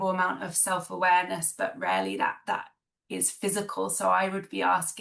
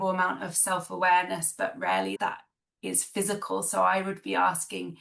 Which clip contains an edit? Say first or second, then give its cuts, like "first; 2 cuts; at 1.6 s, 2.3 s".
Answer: second; 1 cut; at 2.2 s